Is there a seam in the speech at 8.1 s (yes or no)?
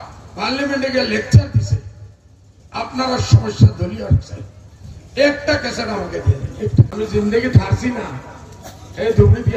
no